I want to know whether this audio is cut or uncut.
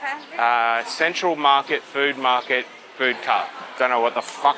cut